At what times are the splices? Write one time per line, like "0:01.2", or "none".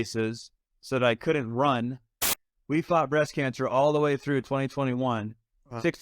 0:02.3